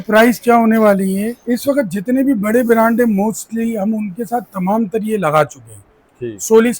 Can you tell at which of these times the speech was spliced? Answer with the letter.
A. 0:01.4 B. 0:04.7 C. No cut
A